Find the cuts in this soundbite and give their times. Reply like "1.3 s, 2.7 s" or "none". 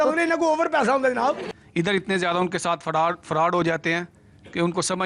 1.5 s

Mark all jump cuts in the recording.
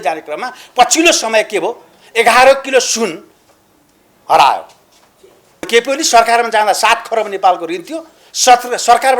5.6 s

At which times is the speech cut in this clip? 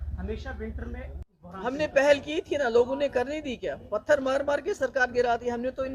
1.3 s

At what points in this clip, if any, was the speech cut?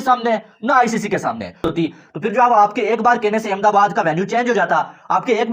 none

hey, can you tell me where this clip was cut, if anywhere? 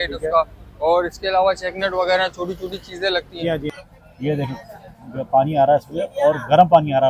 3.8 s

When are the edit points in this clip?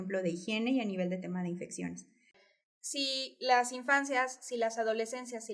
2.4 s

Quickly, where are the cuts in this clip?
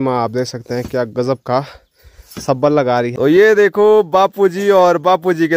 3.1 s

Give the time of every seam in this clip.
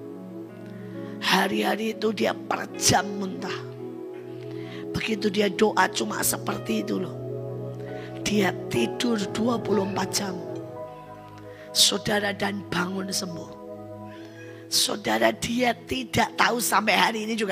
none

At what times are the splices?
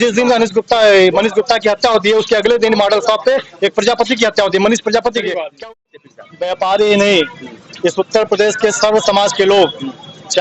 5.6 s

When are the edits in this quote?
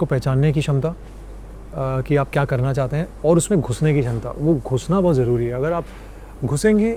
none

